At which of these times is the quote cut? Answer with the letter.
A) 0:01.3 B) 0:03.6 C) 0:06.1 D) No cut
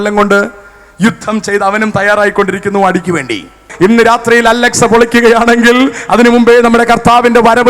B